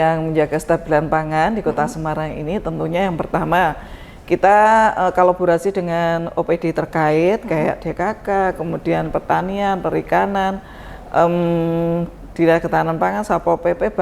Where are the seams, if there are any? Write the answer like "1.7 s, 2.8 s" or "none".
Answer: none